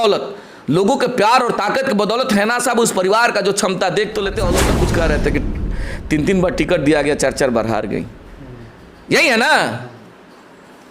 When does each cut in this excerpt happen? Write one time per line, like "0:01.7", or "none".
0:04.7